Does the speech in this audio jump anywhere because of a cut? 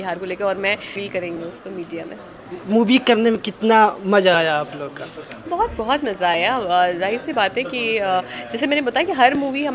yes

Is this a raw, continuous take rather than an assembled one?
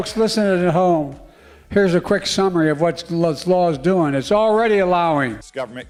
yes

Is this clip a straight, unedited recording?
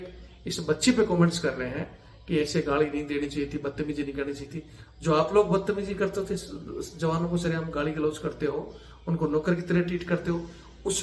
yes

